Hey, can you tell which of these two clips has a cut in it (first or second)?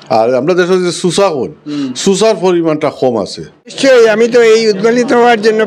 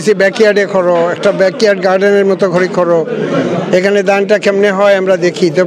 first